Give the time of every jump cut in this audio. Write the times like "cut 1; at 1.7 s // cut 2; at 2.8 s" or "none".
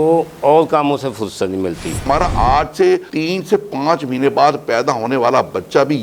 cut 1; at 2.0 s